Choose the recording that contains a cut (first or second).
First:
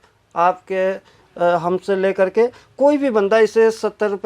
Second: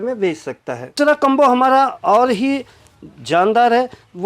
second